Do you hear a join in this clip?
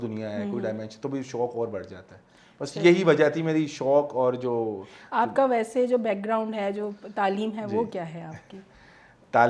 no; 0 cuts

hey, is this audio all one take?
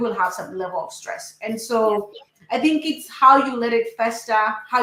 yes; 0 cuts

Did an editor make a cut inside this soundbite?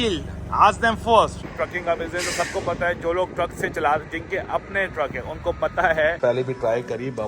yes; 2 cuts; at 1.4 s, 6.2 s

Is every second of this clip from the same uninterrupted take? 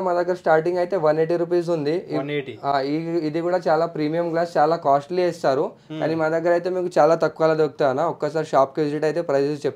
yes; 0 cuts

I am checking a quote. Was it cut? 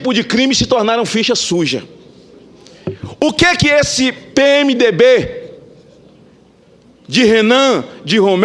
no; 0 cuts

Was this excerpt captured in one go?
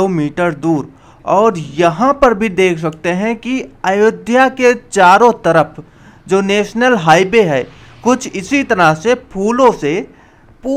yes; 0 cuts

